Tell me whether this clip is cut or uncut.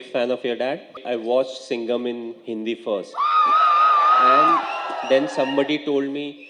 cut